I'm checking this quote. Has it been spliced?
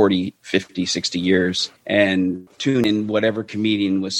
yes; 2 cuts; at 1.7 s, 2.8 s

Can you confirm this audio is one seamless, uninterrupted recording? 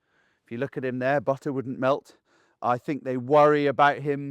yes; 0 cuts

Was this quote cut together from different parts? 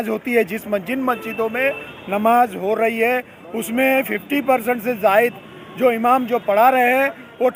no; 0 cuts

